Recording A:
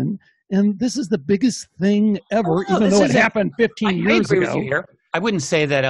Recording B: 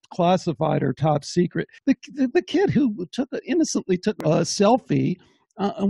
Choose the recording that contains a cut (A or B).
B